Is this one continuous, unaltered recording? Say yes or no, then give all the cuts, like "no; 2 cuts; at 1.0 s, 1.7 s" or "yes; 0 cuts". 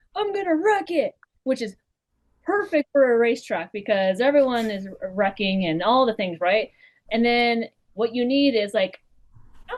yes; 0 cuts